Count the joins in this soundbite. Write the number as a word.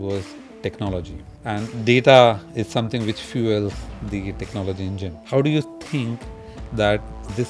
two